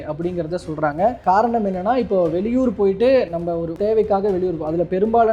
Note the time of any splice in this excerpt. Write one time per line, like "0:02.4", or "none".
0:01.2
0:03.7